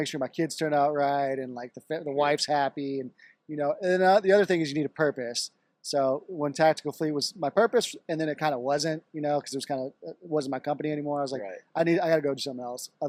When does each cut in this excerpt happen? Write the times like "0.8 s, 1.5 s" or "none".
none

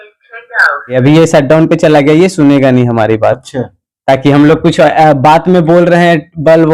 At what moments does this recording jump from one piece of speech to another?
0.9 s

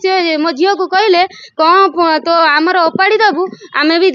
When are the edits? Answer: none

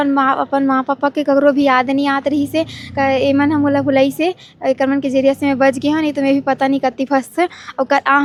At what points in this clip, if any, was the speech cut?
none

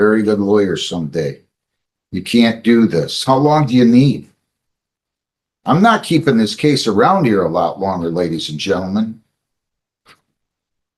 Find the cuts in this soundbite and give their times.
none

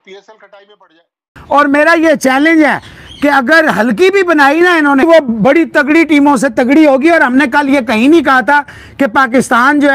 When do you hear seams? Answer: 1.2 s, 5.0 s

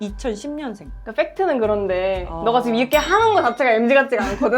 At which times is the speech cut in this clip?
none

